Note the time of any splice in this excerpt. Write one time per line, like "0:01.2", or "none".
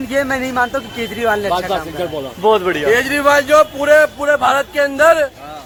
none